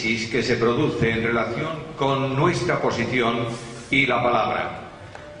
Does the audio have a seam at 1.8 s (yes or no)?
yes